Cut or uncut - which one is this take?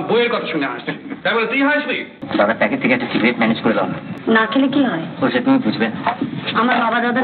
cut